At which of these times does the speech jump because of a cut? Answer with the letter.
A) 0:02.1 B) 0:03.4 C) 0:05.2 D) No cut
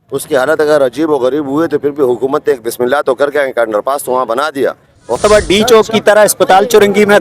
C